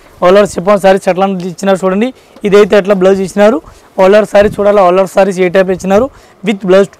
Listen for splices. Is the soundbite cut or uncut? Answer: uncut